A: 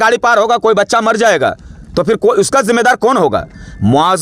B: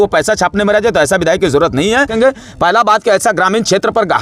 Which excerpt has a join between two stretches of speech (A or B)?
B